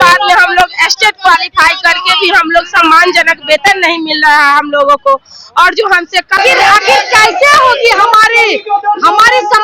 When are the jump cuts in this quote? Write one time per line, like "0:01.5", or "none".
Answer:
0:06.4